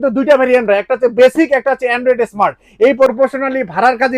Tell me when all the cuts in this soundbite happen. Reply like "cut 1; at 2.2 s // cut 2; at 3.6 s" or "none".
cut 1; at 3.1 s